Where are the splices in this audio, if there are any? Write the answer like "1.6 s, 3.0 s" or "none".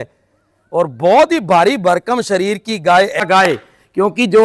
3.2 s